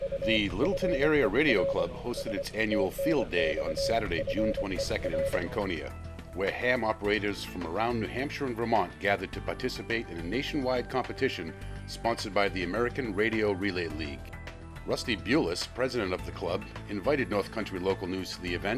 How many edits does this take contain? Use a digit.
0